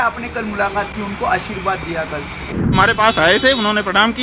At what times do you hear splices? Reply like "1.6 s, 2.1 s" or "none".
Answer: 2.7 s